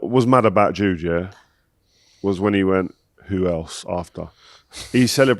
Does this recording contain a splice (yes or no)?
no